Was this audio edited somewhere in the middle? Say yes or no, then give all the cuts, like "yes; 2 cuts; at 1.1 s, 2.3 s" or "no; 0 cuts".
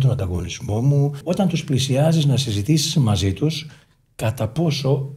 yes; 1 cut; at 1.2 s